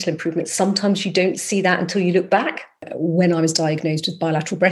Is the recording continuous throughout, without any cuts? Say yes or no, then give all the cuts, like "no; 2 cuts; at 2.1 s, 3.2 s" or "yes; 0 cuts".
no; 1 cut; at 2.9 s